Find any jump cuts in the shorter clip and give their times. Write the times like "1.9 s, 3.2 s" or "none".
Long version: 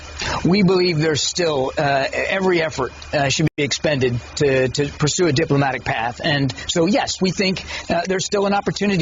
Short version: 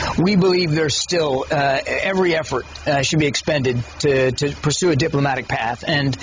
3.2 s